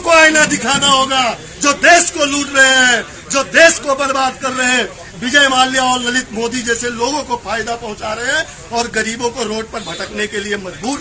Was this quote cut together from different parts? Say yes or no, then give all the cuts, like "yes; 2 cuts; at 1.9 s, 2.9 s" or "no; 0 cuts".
no; 0 cuts